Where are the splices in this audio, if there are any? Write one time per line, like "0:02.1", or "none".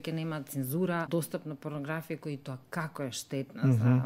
0:01.1

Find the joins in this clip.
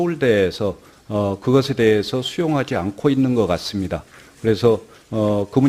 0:01.3

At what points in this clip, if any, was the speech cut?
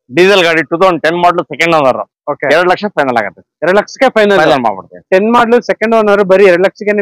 none

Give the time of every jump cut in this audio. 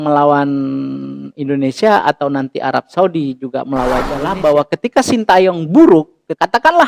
0:04.3

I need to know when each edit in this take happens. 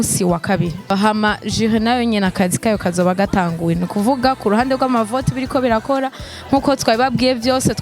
0:00.9

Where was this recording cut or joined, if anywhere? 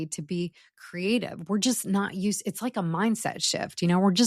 none

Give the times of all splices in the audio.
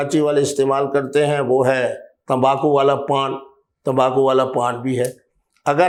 none

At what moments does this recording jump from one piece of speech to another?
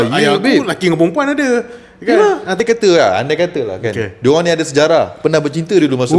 0:02.6

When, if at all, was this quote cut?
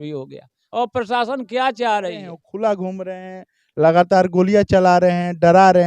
0:02.4

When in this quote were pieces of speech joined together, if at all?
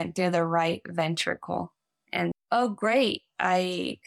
0:02.3

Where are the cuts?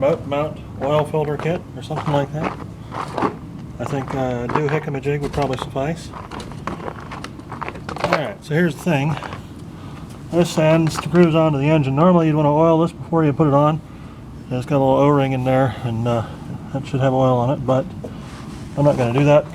none

